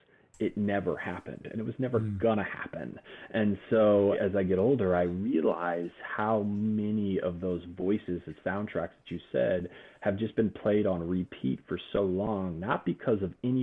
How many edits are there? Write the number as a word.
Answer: one